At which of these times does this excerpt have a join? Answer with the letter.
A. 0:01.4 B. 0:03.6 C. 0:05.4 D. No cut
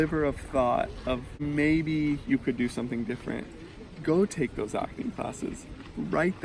A